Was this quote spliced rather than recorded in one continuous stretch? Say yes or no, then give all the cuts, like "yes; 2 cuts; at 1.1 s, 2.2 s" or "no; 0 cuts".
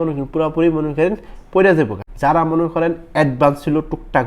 yes; 1 cut; at 2.0 s